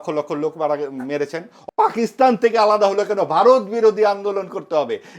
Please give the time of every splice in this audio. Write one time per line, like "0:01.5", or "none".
0:01.5